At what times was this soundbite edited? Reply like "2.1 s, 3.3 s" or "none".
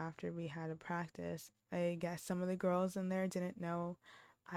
1.5 s